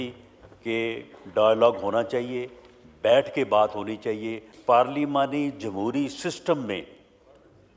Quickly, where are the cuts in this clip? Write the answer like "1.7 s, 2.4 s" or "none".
4.5 s

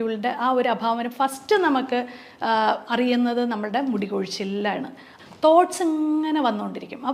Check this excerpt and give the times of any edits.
5.0 s

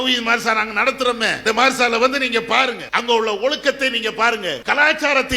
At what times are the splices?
1.4 s, 2.9 s, 4.6 s

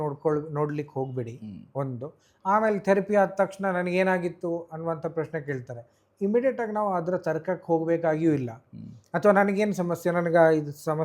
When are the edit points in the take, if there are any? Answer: none

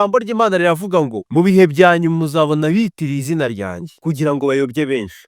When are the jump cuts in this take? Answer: 1.2 s, 3.9 s

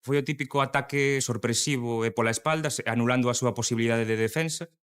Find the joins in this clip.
1.2 s

